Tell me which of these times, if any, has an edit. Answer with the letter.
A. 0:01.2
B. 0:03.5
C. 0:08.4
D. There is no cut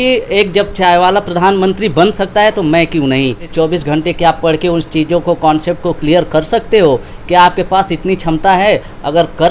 B